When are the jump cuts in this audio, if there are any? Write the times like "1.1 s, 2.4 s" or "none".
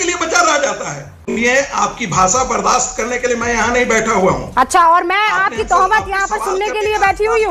1.1 s